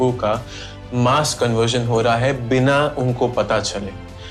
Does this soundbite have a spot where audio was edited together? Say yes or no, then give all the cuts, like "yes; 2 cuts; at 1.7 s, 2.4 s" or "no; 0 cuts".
no; 0 cuts